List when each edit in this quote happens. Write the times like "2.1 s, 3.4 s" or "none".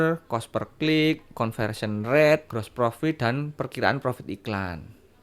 2.6 s